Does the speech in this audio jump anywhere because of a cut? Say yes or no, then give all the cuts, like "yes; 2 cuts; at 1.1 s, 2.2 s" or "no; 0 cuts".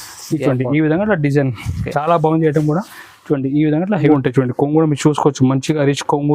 yes; 1 cut; at 4.1 s